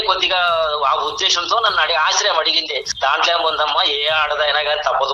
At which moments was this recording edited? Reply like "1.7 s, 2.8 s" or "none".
2.9 s